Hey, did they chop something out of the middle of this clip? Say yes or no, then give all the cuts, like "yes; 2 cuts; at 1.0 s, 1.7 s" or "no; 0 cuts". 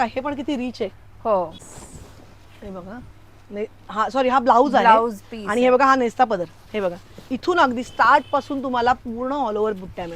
yes; 1 cut; at 1.5 s